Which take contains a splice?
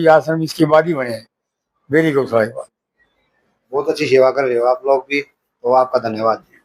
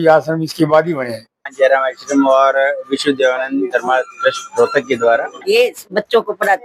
second; 2 cuts; at 1.4 s, 5.4 s

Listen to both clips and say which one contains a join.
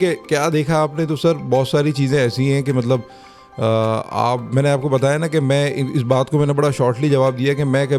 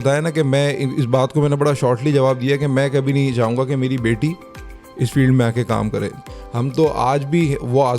second; 1 cut; at 6.2 s

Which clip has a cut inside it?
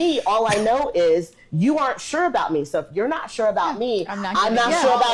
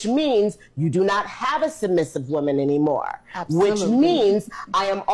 second; 1 cut; at 2.8 s

